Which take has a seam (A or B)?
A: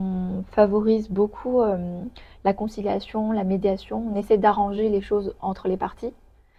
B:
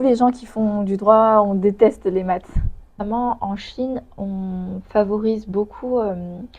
B